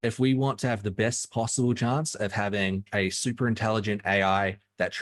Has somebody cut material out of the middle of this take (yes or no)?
yes